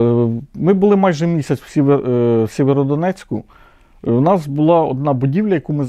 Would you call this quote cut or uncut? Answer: uncut